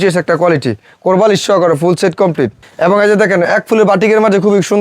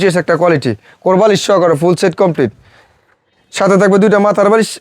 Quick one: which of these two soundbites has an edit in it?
first; 1 cut; at 2.6 s

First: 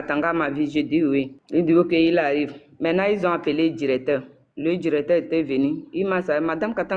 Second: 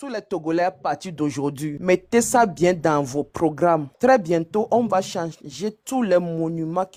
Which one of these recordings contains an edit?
first; 1 cut; at 1.4 s

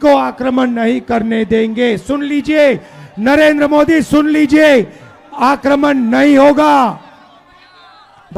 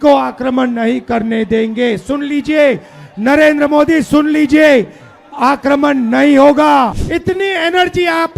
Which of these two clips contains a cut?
second; 1 cut; at 7.0 s

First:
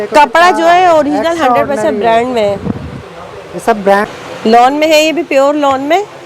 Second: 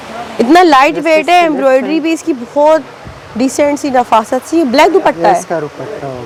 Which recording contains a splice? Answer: first; 1 cut; at 4.1 s

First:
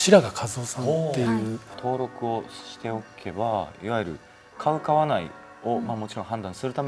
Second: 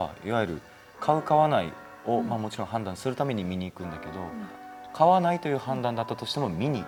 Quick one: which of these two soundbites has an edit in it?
first; 1 cut; at 1.7 s

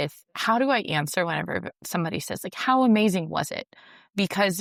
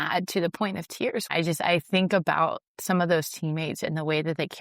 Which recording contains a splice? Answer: second; 1 cut; at 1.3 s

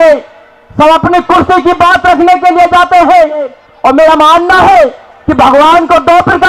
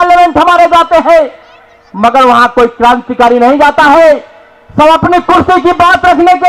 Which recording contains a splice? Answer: first; 1 cut; at 3.6 s

